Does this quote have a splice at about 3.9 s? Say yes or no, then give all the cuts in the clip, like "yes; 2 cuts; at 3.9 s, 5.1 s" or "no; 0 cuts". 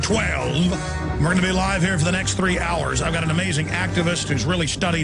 no; 1 cut; at 2.3 s